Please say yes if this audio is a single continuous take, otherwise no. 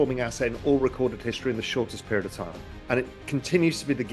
yes